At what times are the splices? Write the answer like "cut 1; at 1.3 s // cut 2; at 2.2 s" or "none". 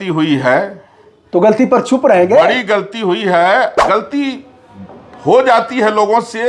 cut 1; at 3.8 s